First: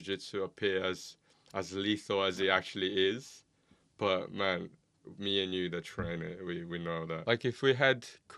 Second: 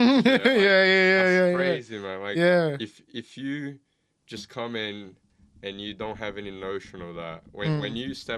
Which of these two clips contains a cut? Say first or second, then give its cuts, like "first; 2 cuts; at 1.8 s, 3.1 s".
first; 1 cut; at 7.1 s